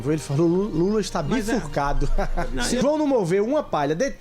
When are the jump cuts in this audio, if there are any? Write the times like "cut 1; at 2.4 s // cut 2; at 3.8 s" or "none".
cut 1; at 2.8 s

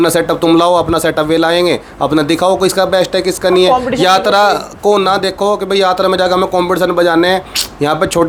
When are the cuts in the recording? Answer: none

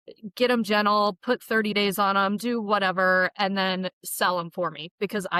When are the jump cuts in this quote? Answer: none

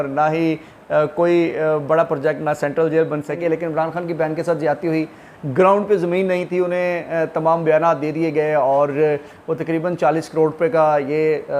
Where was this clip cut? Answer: cut 1; at 3.4 s

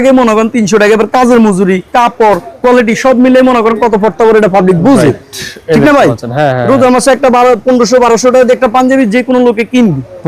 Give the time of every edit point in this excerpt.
none

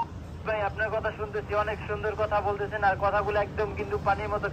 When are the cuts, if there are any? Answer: none

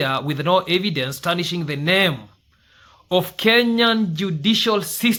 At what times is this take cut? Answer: none

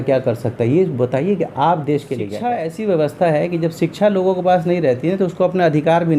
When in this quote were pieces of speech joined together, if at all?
cut 1; at 2.4 s

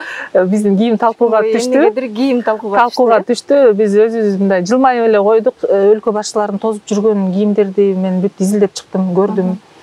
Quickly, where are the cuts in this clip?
cut 1; at 5.6 s

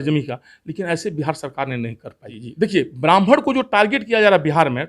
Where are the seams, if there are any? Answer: cut 1; at 2.4 s

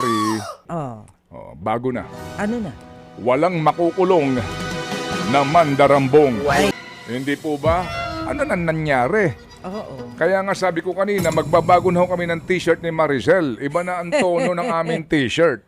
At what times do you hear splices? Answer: cut 1; at 6.7 s

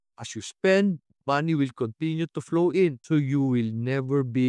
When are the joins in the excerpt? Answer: cut 1; at 3.0 s

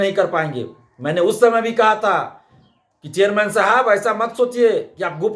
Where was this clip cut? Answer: none

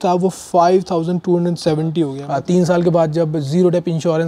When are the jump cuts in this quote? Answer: cut 1; at 2.2 s

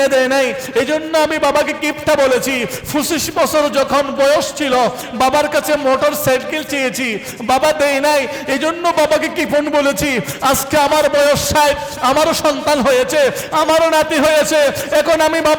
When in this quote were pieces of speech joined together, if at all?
none

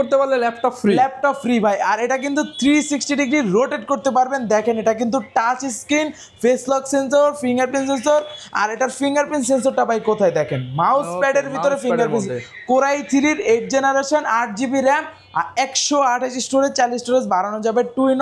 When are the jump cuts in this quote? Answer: none

